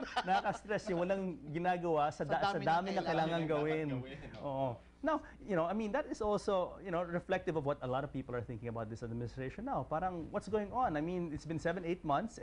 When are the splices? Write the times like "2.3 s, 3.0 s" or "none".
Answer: 3.0 s